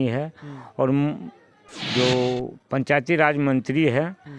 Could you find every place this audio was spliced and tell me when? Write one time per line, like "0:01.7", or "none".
none